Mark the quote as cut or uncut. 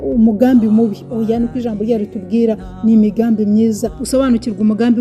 cut